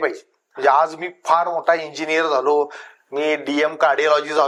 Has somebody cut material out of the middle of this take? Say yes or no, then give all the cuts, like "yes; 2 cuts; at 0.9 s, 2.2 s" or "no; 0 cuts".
no; 0 cuts